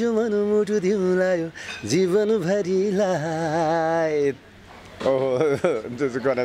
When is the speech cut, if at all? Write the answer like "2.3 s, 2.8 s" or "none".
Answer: 4.4 s